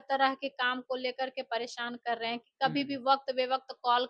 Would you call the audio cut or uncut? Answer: uncut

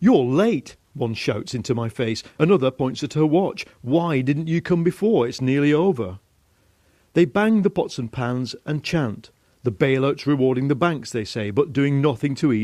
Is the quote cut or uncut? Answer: cut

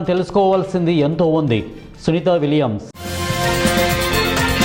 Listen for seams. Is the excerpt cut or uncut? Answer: uncut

